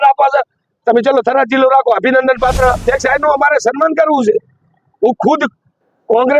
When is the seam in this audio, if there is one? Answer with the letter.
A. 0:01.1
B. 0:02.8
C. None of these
B